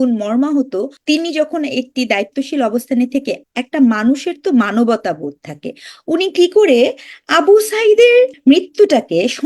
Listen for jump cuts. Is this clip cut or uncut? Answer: cut